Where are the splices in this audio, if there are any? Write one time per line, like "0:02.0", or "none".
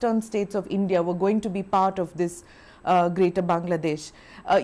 0:02.1